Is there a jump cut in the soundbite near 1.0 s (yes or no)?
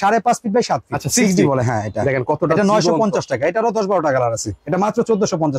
yes